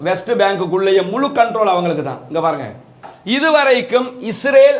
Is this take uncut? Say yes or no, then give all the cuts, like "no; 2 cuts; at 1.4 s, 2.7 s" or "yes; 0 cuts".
no; 1 cut; at 3.1 s